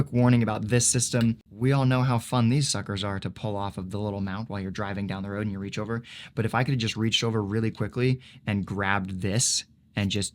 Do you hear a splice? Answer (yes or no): yes